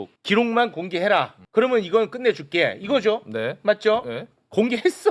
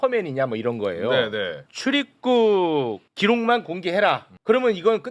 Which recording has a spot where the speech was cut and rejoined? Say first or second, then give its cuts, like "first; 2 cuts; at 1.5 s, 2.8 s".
second; 1 cut; at 1.7 s